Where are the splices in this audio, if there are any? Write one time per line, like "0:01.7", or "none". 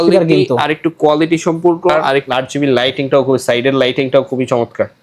0:02.1